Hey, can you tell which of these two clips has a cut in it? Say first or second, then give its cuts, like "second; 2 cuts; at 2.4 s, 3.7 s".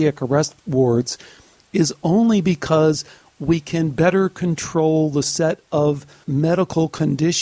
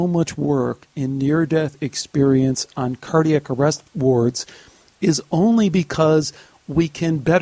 first; 1 cut; at 6.1 s